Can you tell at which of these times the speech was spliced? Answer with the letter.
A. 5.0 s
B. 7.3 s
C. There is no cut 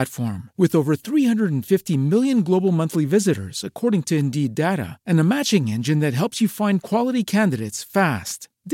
C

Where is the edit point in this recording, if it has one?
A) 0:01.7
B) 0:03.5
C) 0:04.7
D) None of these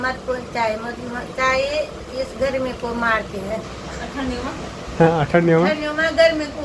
D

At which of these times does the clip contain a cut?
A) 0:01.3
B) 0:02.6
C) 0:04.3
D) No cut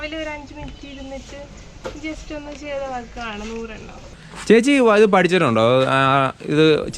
C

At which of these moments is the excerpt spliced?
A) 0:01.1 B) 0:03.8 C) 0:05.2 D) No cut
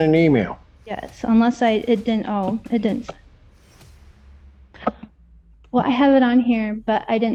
D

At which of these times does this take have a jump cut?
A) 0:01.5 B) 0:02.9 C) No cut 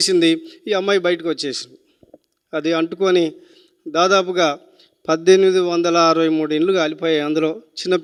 C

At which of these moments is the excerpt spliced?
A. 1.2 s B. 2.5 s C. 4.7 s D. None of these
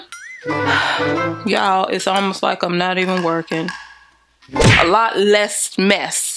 C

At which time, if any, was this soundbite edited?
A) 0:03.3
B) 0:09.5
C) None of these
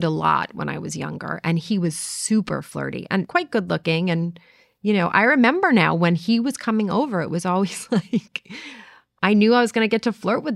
A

